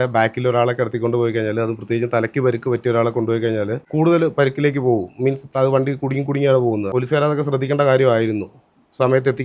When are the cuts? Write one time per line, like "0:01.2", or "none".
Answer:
0:03.8
0:06.9